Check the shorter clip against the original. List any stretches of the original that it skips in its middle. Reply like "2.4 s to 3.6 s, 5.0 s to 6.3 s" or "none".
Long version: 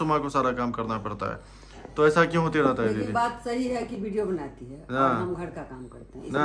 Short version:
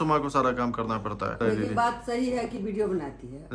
1.4 s to 2.8 s

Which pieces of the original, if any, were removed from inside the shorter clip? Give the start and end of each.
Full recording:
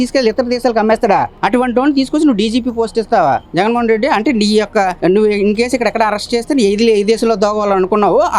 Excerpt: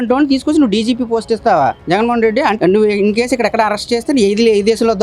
4.2 s to 5.0 s

